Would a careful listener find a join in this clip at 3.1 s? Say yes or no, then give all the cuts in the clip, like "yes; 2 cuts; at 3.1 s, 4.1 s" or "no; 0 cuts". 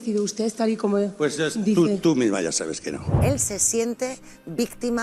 yes; 1 cut; at 3.1 s